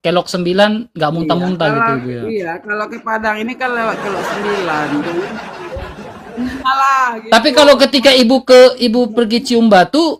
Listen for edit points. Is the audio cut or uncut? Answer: uncut